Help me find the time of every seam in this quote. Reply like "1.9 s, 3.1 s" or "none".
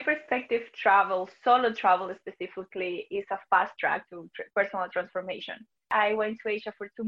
5.9 s